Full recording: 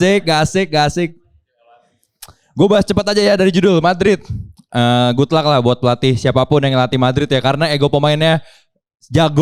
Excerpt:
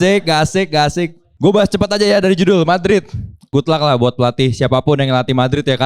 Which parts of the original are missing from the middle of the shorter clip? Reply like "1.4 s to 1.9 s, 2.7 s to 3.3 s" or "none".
1.2 s to 2.4 s, 4.7 s to 5.1 s